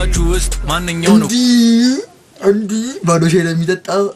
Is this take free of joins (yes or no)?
yes